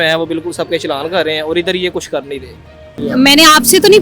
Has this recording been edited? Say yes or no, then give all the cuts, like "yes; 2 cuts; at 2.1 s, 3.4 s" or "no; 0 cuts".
yes; 1 cut; at 2.9 s